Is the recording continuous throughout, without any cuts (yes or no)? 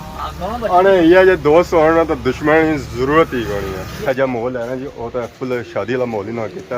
no